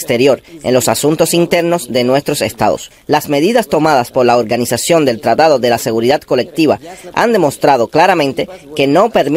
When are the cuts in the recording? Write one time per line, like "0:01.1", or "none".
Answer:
none